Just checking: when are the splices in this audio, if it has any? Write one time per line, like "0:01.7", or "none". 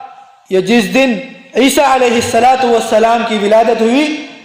none